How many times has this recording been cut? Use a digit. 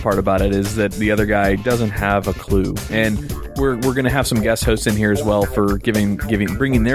1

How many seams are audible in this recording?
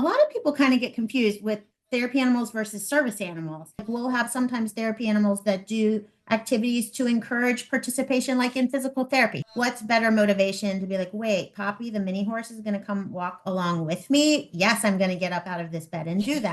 2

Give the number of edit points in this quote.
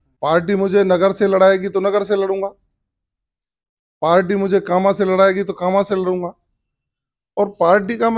0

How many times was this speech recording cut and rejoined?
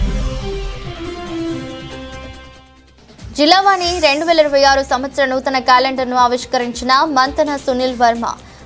0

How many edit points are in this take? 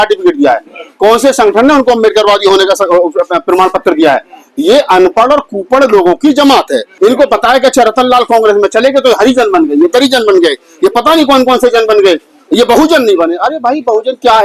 1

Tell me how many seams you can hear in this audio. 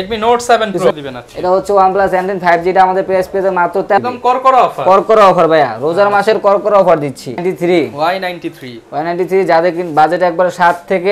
3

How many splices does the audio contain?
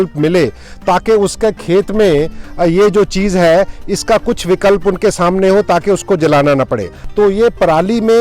1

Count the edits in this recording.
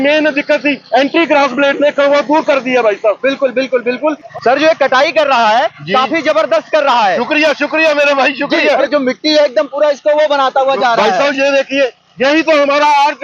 0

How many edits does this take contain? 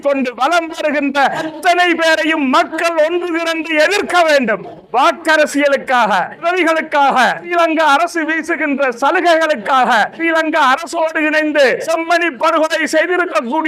6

